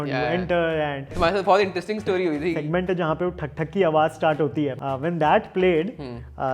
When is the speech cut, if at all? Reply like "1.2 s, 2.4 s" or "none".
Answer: 1.1 s, 2.6 s, 4.8 s